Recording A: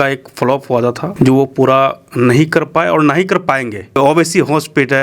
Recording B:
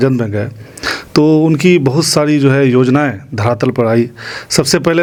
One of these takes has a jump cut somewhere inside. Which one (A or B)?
A